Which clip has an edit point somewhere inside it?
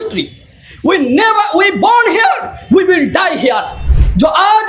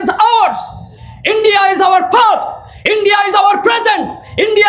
first; 1 cut; at 3.8 s

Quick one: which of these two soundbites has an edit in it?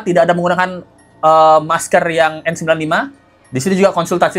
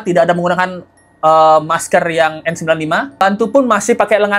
second; 1 cut; at 3.2 s

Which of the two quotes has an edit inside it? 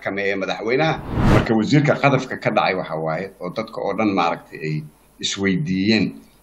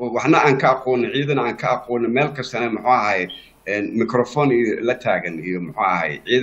first; 1 cut; at 1.1 s

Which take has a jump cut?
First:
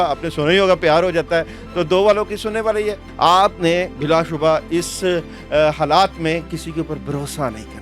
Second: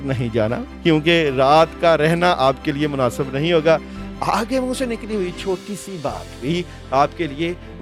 first; 1 cut; at 3.0 s

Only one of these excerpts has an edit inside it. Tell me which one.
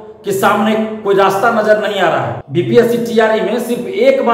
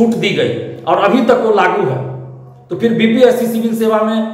first; 1 cut; at 2.4 s

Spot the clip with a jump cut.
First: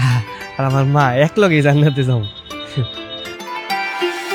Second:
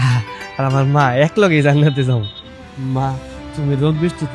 second; 2 cuts; at 2.4 s, 3.4 s

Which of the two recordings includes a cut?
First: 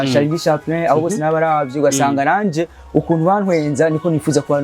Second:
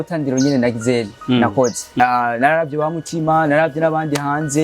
second; 1 cut; at 2.0 s

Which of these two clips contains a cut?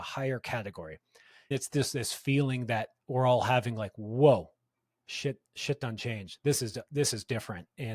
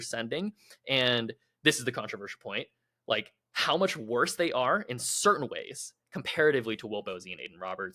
first; 1 cut; at 1.5 s

